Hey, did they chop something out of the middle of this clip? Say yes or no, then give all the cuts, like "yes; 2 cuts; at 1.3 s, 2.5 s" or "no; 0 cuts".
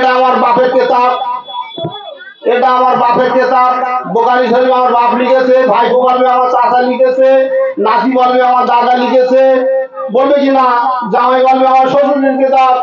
no; 0 cuts